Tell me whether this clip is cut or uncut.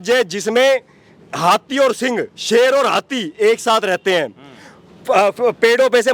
uncut